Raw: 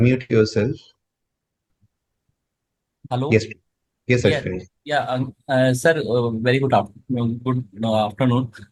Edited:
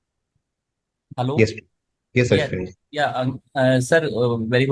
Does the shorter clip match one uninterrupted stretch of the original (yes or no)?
yes